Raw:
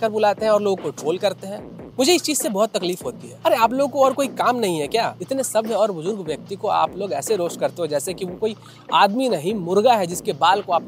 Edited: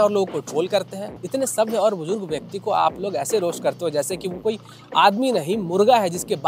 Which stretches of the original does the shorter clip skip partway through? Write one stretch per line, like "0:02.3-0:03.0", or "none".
0:01.7-0:05.2